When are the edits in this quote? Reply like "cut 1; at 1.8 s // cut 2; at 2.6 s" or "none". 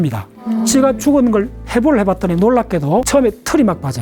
cut 1; at 3.1 s